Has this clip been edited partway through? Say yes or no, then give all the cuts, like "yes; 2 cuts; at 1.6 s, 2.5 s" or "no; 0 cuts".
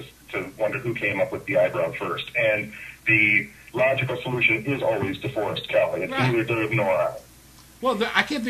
no; 0 cuts